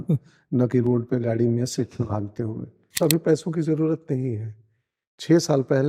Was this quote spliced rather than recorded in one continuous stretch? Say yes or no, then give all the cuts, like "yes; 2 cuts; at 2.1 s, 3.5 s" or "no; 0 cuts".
yes; 1 cut; at 3.0 s